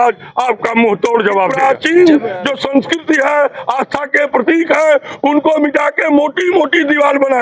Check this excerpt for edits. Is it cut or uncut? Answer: cut